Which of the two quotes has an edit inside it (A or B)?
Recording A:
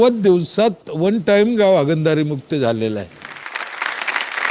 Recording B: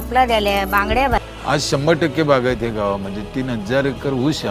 B